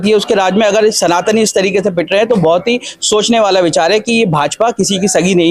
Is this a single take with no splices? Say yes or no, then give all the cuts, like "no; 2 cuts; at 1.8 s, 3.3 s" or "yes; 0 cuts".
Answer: yes; 0 cuts